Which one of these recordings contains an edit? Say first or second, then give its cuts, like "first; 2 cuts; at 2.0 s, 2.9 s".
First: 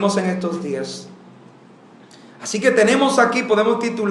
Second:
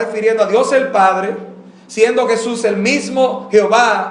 second; 1 cut; at 0.9 s